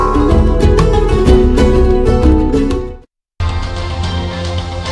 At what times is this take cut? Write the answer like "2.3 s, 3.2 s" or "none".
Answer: 3.4 s